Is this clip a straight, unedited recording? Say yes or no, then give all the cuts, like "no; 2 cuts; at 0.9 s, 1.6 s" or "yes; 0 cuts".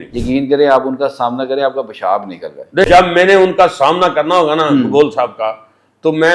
no; 1 cut; at 2.8 s